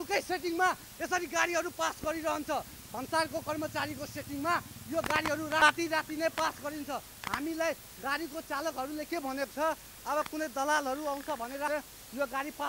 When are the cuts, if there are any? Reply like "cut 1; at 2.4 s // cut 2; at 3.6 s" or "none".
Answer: cut 1; at 5.6 s // cut 2; at 11.7 s